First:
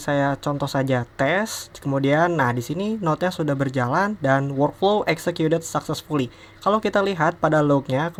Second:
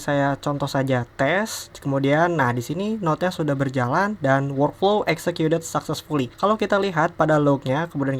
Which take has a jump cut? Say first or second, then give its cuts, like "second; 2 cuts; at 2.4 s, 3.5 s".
second; 1 cut; at 6.3 s